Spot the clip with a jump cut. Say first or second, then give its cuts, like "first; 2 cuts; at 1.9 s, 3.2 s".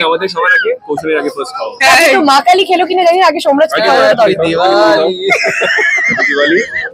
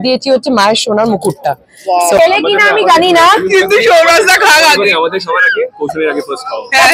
second; 1 cut; at 2.2 s